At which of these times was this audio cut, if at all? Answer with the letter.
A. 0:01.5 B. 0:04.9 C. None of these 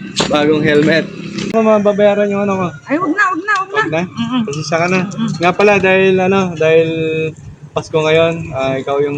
A